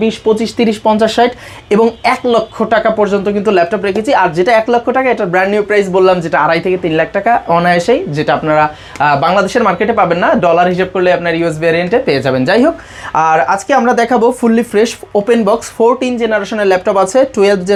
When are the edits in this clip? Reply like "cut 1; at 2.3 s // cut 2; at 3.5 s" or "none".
none